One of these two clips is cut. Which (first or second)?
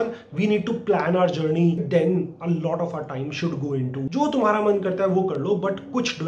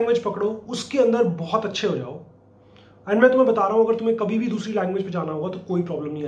first